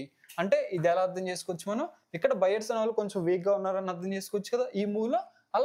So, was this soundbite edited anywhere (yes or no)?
no